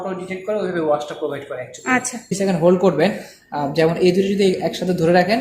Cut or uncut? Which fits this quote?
cut